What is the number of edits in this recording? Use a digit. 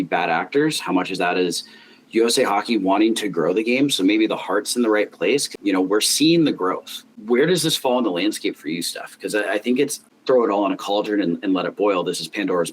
3